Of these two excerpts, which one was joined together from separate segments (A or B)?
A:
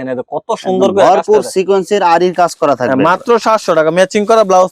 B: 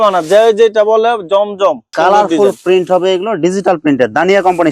B